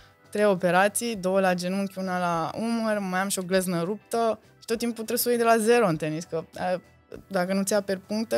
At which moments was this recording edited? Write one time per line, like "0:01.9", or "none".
none